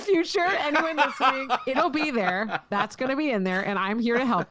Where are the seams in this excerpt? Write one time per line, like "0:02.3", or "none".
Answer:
none